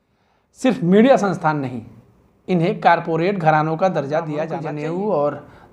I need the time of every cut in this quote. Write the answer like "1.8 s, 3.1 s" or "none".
4.5 s